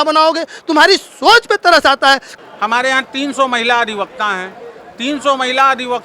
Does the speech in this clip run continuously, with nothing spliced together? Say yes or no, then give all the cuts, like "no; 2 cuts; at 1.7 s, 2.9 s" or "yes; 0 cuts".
no; 1 cut; at 2.5 s